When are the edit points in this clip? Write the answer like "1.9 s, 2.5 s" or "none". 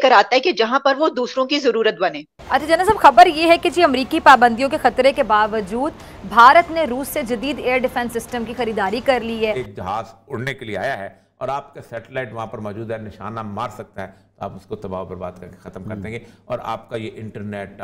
2.3 s, 9.6 s